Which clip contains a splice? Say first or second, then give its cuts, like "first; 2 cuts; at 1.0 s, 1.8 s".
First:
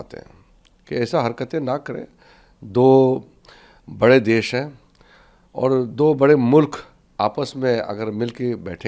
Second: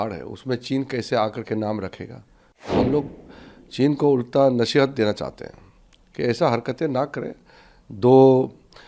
second; 1 cut; at 2.7 s